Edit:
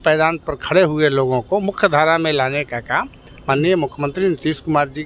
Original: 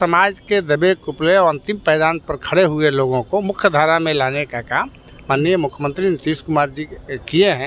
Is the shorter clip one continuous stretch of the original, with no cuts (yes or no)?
yes